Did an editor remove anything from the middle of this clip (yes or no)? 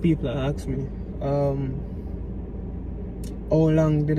no